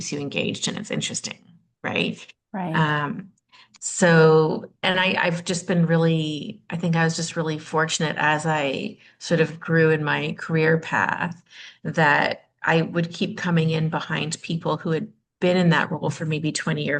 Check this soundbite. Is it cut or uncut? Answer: uncut